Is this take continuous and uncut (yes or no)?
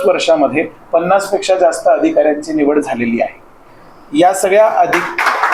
yes